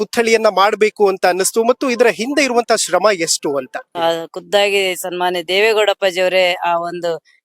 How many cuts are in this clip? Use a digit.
1